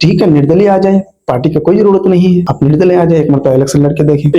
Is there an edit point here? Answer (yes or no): no